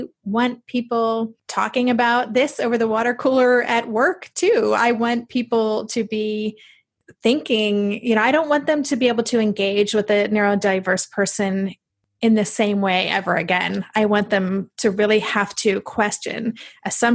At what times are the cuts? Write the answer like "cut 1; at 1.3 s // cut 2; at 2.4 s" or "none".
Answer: cut 1; at 1.4 s